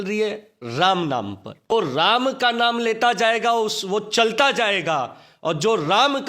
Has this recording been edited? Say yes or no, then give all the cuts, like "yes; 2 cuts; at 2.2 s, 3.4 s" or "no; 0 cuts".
yes; 1 cut; at 1.7 s